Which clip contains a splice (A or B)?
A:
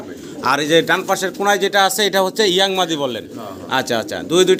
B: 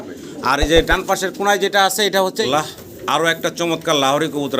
B